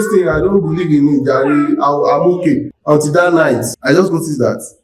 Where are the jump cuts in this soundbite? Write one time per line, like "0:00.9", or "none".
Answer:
0:02.7
0:03.7